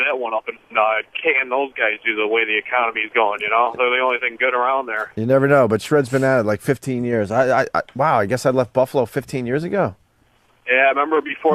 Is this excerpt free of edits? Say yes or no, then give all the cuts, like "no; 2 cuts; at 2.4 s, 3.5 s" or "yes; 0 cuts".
no; 1 cut; at 2.7 s